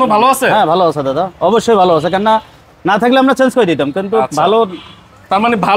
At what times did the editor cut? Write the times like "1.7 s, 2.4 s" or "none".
none